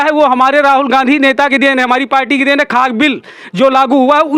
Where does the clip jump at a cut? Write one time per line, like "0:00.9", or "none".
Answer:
none